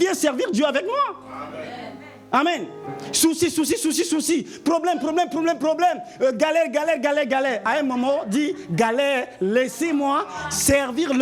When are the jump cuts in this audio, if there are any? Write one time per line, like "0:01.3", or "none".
none